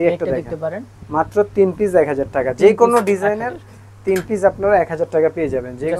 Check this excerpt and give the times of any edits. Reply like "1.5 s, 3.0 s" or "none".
0.9 s

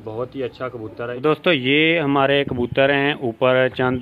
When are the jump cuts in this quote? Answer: 1.1 s

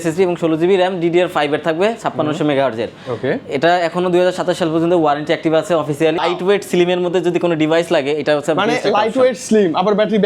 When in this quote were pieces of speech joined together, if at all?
6.2 s

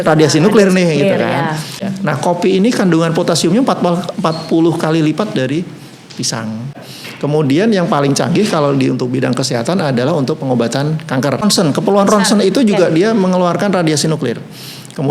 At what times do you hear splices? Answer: 1.8 s, 6.9 s, 11.4 s

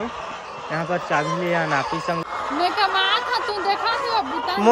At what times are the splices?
2.2 s

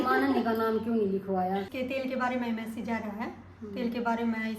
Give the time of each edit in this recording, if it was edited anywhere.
1.7 s

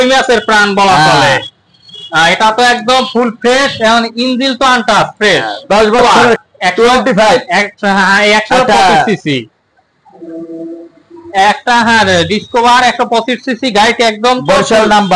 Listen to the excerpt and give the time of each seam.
6.0 s

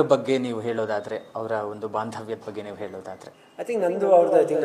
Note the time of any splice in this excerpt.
3.4 s

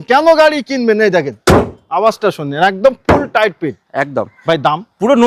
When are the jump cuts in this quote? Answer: none

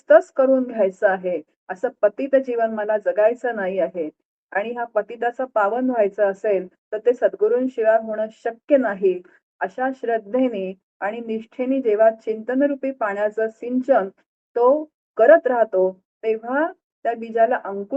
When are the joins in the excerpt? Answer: 16.9 s

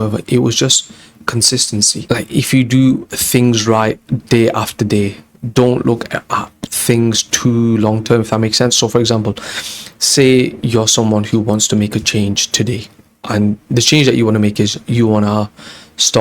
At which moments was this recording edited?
2.0 s

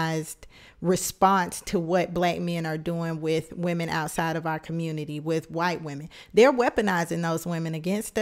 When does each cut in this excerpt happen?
none

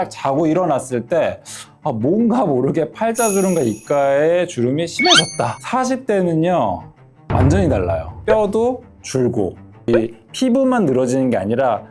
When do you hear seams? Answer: 5.6 s, 8.1 s, 9.9 s

